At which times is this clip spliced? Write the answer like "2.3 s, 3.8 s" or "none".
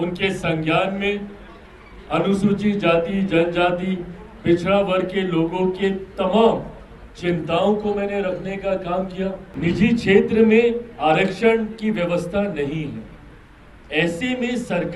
9.5 s

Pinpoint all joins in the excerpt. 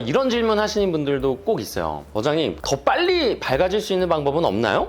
2.6 s

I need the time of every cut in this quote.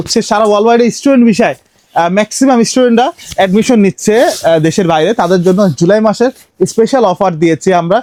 none

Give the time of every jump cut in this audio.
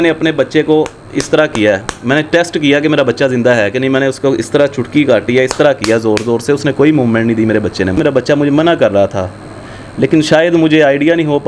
8.0 s

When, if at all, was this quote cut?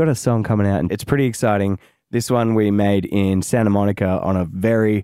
0.9 s

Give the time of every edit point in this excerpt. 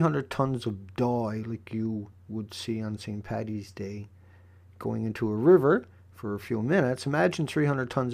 6.9 s

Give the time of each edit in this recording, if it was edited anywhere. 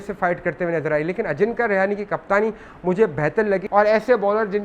3.6 s

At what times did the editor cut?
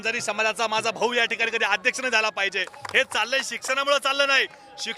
2.8 s

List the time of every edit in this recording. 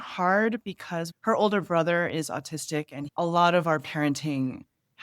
1.0 s

